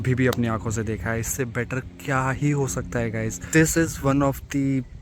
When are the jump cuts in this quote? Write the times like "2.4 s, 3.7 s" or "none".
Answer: 3.4 s